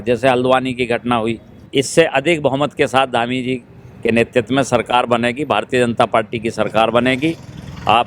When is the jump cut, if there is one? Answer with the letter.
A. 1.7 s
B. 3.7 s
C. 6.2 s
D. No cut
A